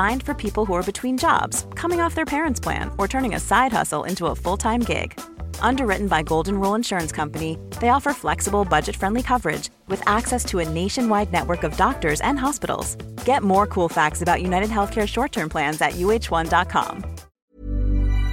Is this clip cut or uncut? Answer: cut